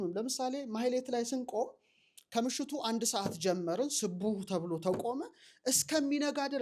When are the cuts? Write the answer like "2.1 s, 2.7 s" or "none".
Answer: none